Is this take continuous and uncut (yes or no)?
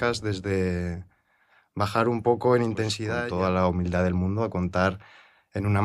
no